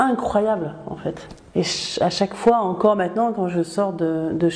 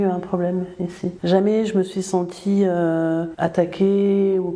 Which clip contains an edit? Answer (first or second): second